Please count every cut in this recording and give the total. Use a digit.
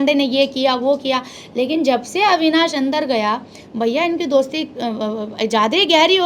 0